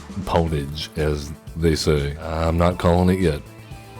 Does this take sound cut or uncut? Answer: cut